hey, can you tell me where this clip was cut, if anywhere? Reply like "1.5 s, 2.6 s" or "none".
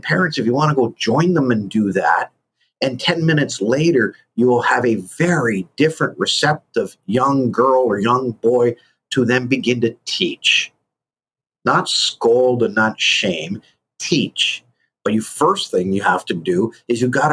none